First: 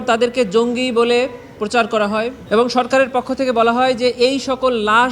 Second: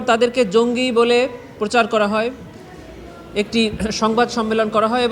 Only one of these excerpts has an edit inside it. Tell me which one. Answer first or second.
first